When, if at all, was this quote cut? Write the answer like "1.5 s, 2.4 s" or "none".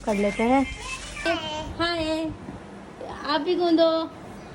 1.3 s